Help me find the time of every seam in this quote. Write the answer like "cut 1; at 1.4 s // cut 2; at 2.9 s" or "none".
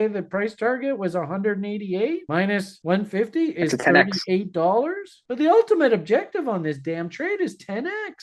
cut 1; at 2.8 s // cut 2; at 5.1 s